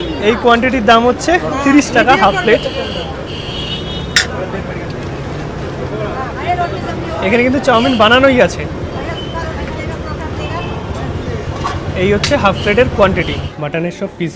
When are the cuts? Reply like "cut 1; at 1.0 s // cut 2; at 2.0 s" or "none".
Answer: cut 1; at 13.4 s